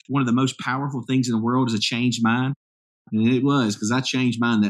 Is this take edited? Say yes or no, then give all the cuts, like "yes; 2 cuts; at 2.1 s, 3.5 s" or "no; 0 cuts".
no; 0 cuts